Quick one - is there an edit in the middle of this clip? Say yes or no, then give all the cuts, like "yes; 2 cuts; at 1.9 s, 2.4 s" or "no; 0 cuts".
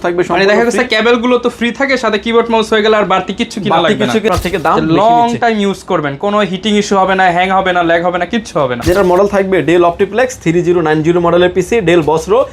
yes; 2 cuts; at 4.3 s, 8.8 s